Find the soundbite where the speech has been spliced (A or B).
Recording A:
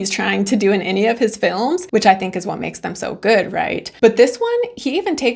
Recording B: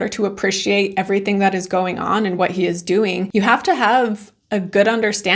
A